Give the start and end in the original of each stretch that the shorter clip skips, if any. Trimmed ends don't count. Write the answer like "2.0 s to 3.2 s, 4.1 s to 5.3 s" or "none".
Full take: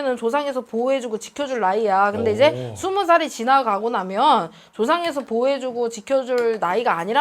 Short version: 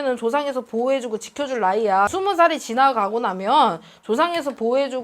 2.1 s to 2.8 s